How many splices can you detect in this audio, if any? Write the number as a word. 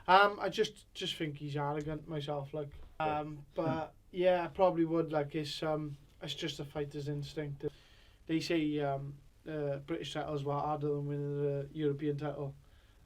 two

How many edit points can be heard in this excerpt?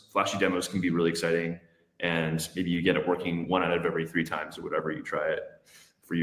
zero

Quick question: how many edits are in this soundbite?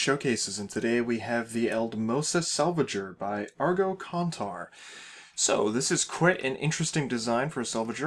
one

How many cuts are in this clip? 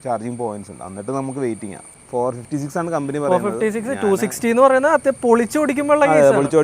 one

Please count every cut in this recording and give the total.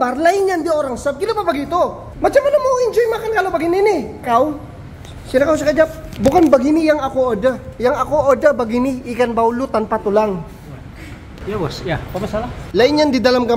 four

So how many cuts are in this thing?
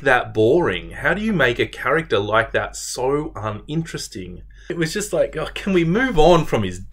one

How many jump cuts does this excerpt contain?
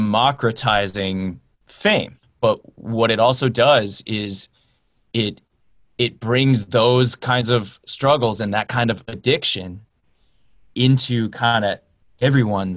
one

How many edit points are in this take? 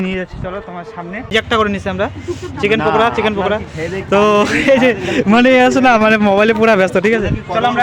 one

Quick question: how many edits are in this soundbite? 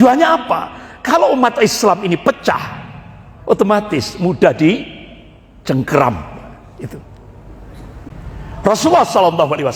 one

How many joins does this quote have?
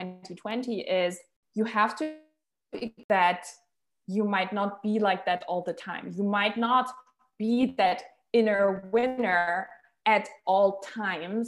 one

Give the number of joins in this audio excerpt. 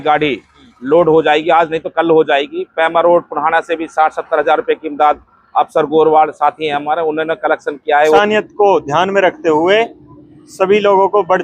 one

